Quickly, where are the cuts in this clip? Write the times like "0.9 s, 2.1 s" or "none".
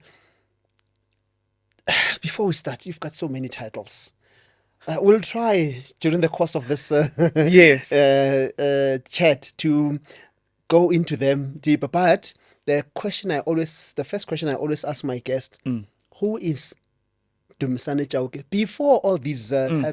none